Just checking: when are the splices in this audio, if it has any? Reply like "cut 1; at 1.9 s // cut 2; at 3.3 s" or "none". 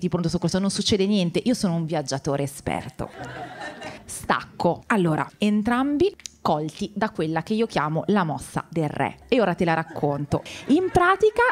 none